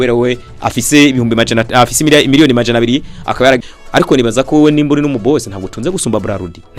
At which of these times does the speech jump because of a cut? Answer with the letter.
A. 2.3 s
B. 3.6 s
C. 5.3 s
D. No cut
B